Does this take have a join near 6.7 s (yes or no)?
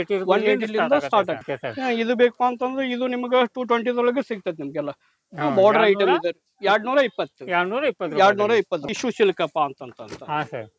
no